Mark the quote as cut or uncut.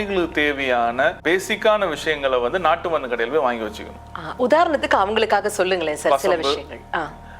cut